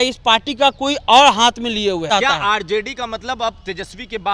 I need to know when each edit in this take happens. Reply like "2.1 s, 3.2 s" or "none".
2.1 s